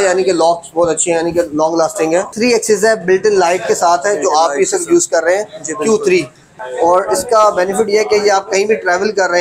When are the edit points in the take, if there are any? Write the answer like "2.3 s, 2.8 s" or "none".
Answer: 2.3 s, 6.5 s